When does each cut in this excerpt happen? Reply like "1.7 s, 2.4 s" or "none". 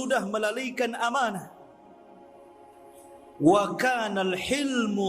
1.5 s, 3.3 s

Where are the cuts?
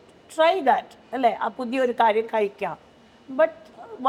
none

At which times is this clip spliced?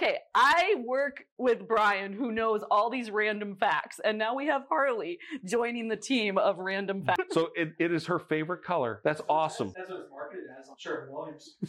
7.2 s, 8.9 s, 9.8 s

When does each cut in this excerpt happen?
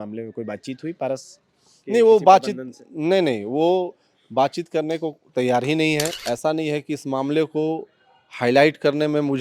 6.2 s

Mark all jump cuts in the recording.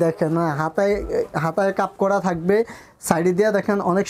none

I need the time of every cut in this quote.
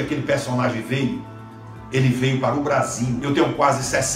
3.2 s

